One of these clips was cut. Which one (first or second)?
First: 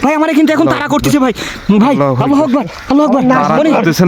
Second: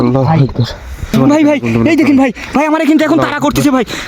second